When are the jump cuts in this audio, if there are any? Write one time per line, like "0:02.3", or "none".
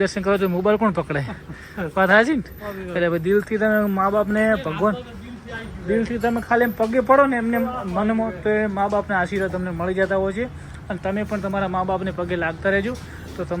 none